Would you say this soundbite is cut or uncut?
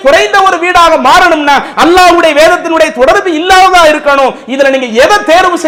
uncut